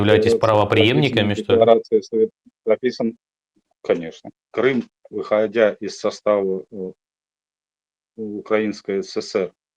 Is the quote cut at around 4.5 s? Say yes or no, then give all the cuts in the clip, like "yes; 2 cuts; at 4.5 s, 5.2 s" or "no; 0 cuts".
yes; 1 cut; at 4.5 s